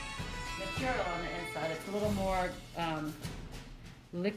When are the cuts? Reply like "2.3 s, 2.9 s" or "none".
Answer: none